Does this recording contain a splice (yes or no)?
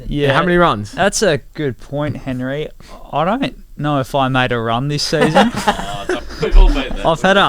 yes